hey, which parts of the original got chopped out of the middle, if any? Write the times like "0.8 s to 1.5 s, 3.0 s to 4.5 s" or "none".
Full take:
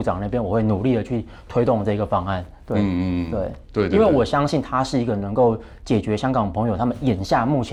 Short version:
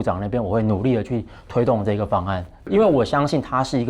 2.7 s to 3.9 s

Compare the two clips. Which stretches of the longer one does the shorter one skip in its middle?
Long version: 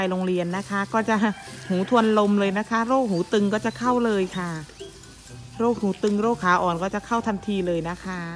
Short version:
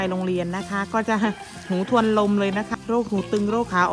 2.7 s to 5.4 s

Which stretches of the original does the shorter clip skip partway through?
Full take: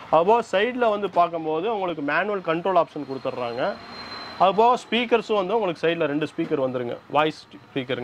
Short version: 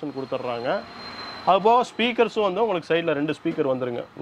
none

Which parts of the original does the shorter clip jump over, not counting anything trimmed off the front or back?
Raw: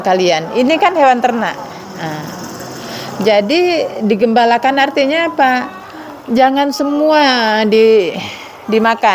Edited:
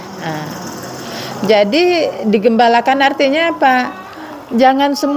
none

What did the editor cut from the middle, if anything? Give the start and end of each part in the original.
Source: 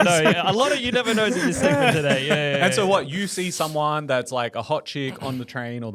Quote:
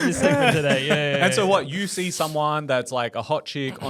none

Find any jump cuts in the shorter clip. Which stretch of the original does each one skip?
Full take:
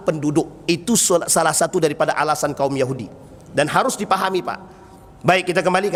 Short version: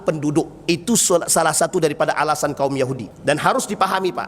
3.1 s to 3.4 s

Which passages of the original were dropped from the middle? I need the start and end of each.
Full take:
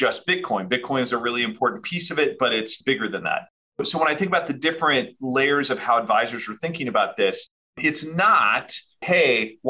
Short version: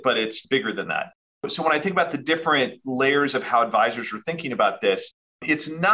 none

